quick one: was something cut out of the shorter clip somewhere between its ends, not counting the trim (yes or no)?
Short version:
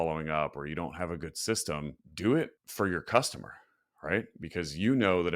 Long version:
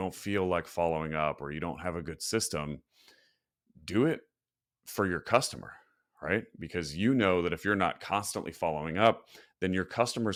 yes